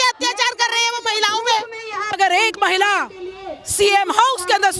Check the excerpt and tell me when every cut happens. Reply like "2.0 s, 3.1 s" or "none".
2.2 s